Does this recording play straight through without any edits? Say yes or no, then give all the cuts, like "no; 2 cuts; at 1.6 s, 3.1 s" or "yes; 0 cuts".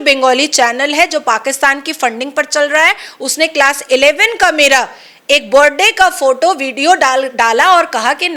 yes; 0 cuts